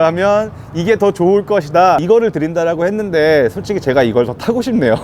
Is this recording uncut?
no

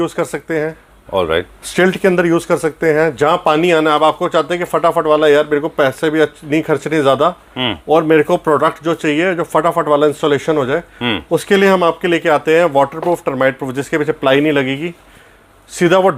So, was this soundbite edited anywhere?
no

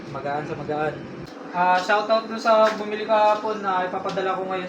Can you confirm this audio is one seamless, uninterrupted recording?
no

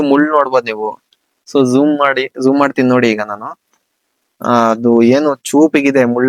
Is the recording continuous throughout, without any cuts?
yes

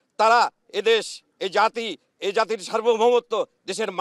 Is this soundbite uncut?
yes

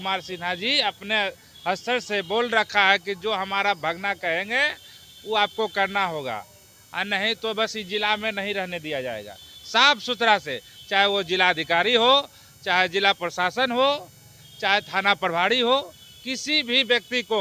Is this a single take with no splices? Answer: yes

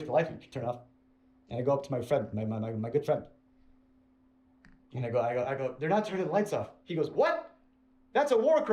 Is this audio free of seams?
yes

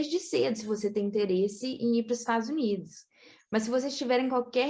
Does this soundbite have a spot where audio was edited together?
no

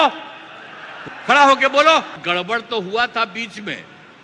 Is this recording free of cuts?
no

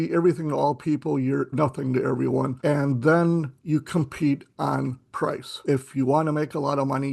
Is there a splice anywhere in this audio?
yes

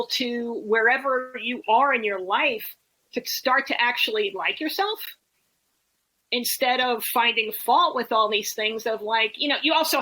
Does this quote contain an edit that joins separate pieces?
no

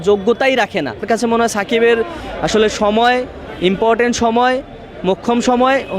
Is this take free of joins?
no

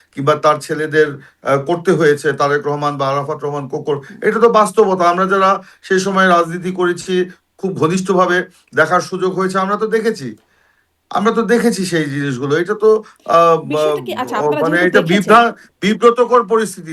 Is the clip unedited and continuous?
yes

